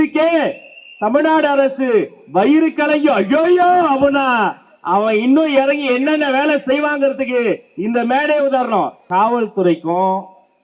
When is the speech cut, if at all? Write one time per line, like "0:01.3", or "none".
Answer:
0:09.0

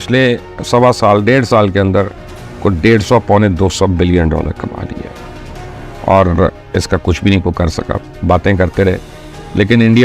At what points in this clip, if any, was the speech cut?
none

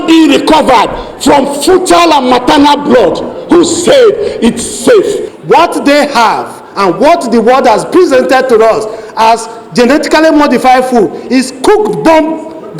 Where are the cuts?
0:05.3

